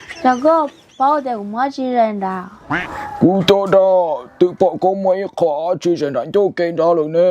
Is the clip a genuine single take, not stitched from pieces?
yes; 0 cuts

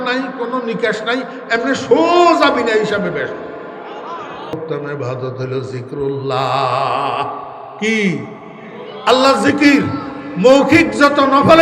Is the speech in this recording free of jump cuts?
no; 1 cut; at 4.5 s

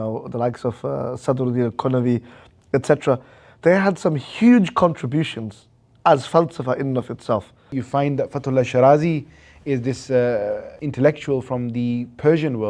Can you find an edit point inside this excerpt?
yes; 2 cuts; at 7.7 s, 10.8 s

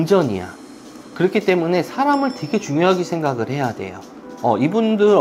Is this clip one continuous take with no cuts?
yes; 0 cuts

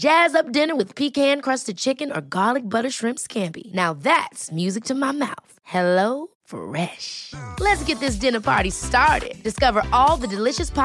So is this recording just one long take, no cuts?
yes; 0 cuts

